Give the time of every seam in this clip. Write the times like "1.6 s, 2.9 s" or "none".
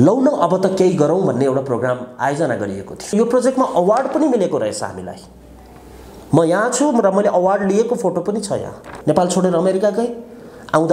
3.1 s, 8.9 s